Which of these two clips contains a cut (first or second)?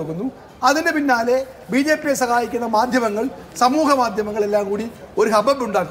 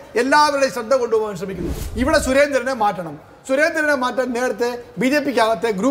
second